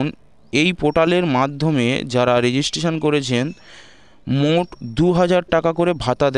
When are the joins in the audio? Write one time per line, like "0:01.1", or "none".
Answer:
none